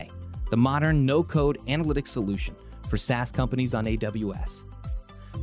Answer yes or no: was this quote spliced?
no